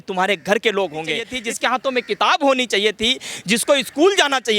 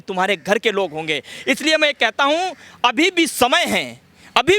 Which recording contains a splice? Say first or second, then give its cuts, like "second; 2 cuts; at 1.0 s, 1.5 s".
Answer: first; 1 cut; at 1.3 s